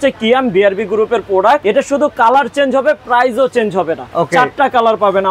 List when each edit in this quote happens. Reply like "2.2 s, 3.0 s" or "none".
1.6 s, 4.0 s